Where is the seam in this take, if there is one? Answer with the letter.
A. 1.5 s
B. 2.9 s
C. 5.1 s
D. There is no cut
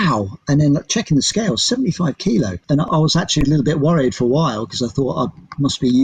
B